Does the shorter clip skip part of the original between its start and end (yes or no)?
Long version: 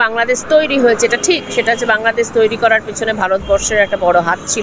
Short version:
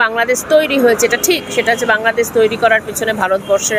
no